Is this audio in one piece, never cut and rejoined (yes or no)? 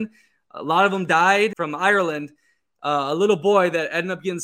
no